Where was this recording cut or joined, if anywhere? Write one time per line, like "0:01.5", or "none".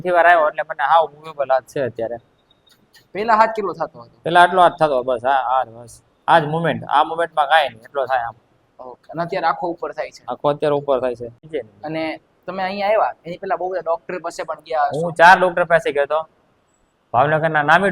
0:11.5